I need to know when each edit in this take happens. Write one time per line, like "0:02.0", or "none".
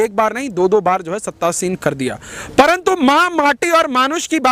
none

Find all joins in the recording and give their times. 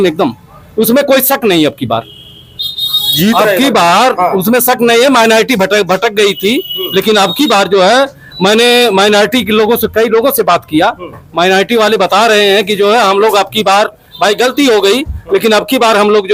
none

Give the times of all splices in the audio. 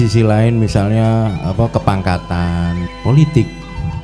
0:02.9

